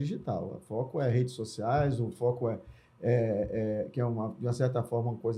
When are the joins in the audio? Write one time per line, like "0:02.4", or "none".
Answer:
none